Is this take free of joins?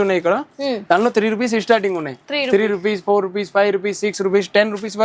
yes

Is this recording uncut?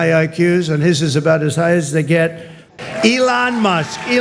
no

